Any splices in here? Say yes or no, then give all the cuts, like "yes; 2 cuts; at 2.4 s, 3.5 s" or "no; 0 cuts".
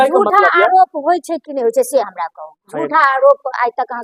no; 0 cuts